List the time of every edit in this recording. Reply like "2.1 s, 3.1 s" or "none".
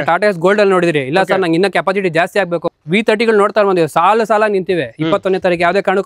2.7 s